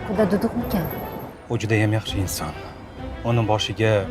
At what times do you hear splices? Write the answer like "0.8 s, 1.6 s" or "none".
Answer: 1.3 s

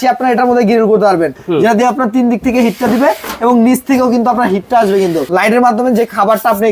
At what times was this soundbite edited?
1.4 s, 5.2 s

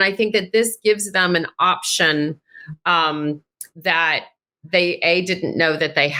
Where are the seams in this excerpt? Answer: none

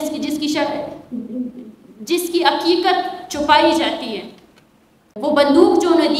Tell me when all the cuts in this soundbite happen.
5.0 s

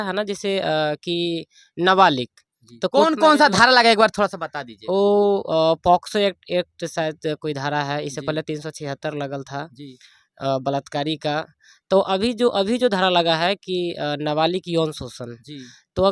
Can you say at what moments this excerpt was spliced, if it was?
none

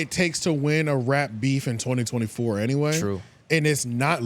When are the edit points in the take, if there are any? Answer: none

